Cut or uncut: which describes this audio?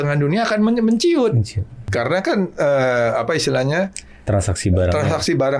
cut